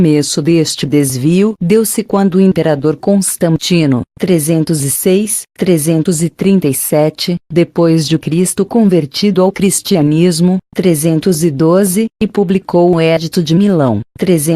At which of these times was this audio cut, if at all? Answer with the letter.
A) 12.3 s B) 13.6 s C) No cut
A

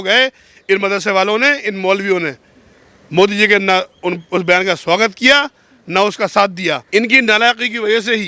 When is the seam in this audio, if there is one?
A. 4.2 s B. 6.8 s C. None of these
B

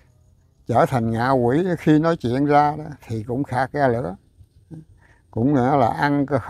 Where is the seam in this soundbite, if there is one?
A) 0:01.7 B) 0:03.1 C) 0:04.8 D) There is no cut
D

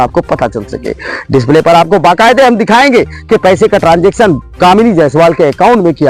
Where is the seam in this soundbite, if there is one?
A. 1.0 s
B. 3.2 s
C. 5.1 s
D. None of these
D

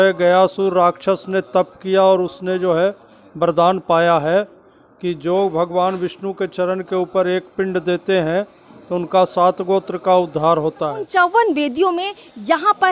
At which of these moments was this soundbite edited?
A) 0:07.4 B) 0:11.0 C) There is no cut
B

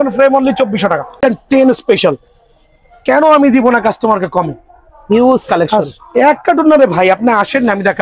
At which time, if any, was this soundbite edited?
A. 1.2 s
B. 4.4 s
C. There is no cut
A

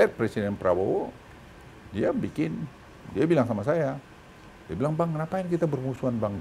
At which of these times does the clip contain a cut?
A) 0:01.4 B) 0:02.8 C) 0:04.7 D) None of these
D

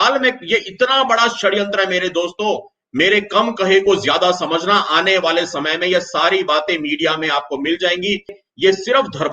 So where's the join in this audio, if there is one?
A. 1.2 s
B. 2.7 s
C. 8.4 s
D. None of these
C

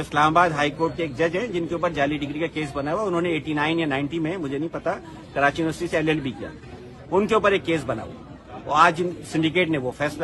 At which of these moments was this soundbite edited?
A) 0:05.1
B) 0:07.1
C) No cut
C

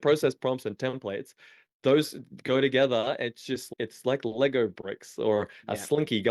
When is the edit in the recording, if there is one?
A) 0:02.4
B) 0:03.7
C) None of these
B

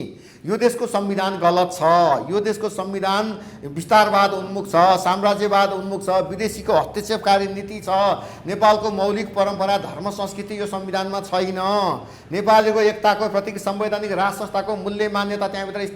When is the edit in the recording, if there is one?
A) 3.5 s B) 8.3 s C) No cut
C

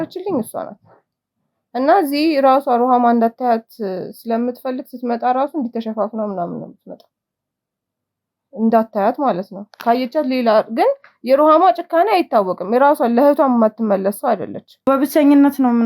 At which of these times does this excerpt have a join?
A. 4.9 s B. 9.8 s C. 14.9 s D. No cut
C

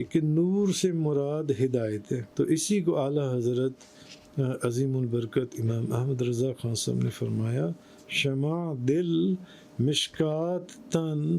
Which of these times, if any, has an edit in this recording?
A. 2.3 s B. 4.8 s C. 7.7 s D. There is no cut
A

